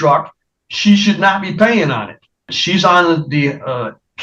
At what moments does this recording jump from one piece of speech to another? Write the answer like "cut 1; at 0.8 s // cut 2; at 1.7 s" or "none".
cut 1; at 2.6 s

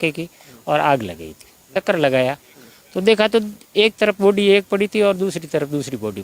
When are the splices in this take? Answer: cut 1; at 1.7 s

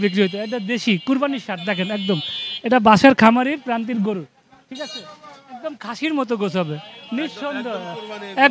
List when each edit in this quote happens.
none

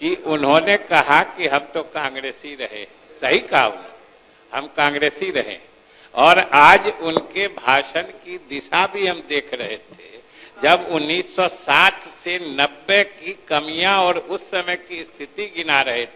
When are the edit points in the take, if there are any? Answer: none

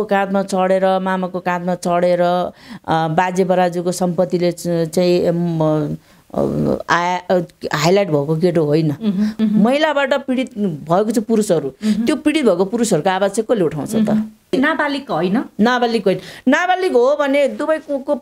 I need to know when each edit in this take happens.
cut 1; at 9.3 s // cut 2; at 14.5 s

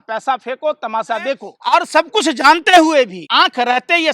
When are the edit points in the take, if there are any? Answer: cut 1; at 1.5 s // cut 2; at 3.2 s

